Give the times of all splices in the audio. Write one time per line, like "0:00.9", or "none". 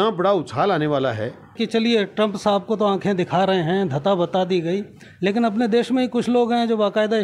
0:01.5